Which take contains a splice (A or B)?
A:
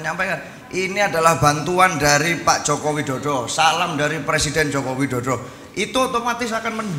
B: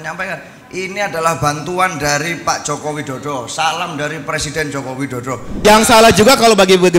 B